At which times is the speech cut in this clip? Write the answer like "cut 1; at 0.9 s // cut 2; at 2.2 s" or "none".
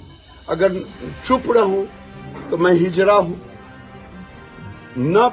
none